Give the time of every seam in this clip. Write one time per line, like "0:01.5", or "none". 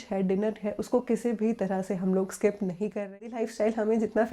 0:03.3

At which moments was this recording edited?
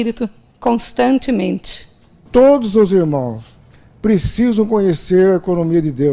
0:02.2

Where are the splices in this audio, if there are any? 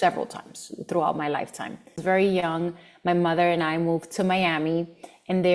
0:02.0

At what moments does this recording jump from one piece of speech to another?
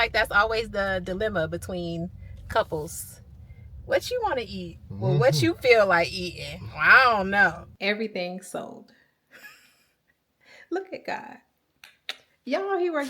0:07.7

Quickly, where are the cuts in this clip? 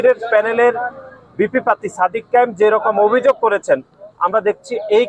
none

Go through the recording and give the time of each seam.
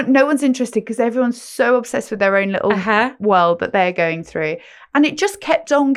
none

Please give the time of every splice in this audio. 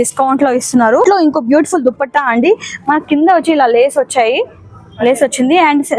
0:01.1

